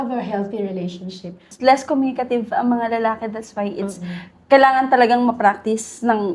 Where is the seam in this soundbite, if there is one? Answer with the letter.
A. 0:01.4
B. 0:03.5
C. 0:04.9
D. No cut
A